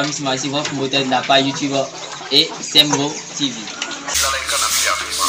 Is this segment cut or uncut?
cut